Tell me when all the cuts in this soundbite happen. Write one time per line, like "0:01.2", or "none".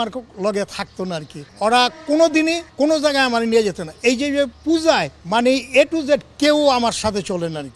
0:01.4
0:02.6
0:04.6
0:05.2